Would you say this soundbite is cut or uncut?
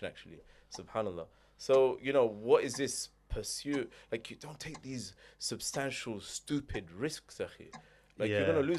uncut